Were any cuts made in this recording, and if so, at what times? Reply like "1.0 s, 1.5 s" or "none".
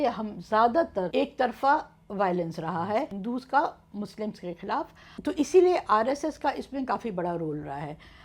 1.1 s, 3.1 s, 5.0 s